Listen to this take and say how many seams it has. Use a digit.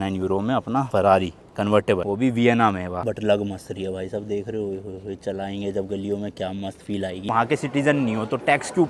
2